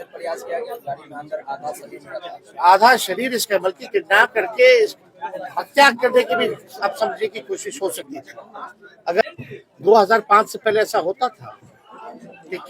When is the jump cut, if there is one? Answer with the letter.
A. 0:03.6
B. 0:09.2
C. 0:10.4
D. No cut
B